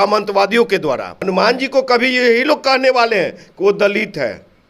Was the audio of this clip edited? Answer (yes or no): yes